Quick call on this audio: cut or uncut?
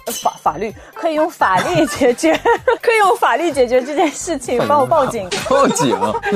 uncut